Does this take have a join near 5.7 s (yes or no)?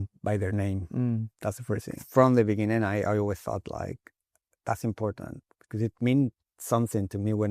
no